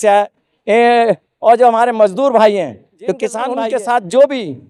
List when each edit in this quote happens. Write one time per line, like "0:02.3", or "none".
0:03.4